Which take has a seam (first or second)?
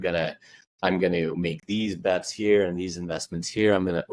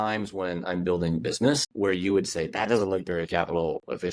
second